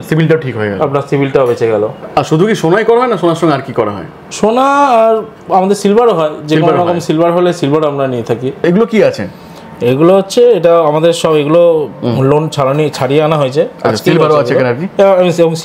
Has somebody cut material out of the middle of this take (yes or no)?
no